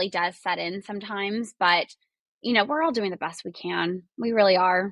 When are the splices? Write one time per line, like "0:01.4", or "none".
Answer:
none